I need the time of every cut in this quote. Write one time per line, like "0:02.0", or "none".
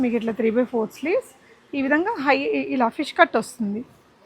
none